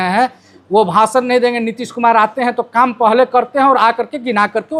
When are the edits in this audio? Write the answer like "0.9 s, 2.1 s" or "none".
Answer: none

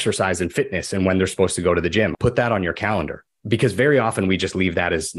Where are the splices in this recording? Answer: 2.1 s, 3.3 s

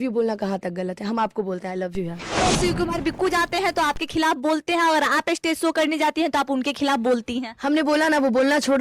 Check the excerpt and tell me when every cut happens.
2.3 s

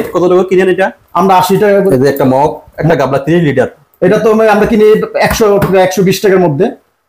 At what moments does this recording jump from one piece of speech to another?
1.9 s, 2.7 s

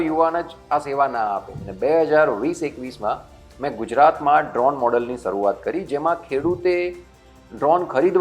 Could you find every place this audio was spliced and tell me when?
1.7 s

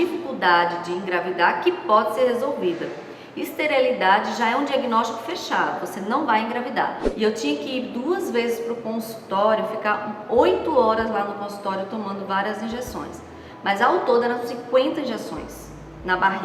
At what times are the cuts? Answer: 7.0 s

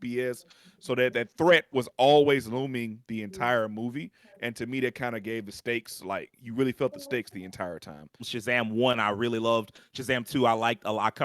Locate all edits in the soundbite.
8.3 s

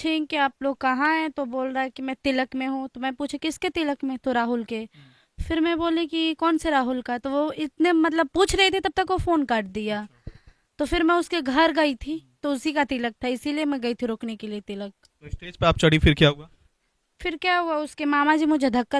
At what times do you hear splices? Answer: none

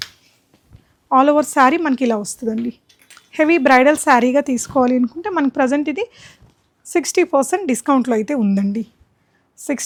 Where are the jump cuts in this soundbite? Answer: none

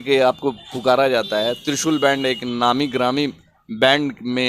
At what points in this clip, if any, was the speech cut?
none

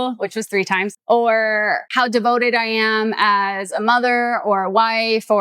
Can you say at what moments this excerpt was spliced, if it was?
1.0 s, 1.9 s

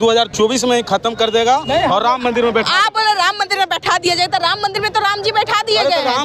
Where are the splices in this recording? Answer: none

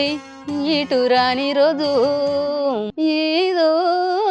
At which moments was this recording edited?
2.9 s

